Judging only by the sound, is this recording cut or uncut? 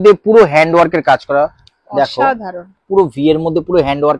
uncut